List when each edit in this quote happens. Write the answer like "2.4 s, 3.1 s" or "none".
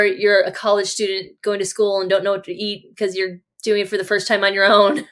none